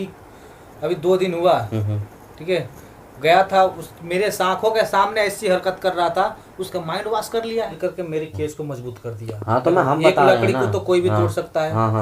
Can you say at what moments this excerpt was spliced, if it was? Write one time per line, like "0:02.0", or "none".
0:07.7